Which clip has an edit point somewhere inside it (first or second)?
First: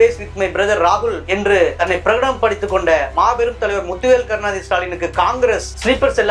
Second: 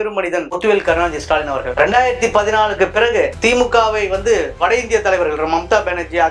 second